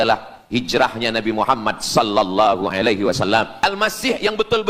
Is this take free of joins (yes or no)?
no